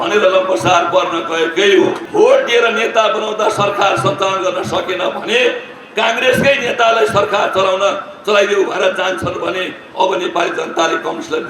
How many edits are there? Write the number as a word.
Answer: one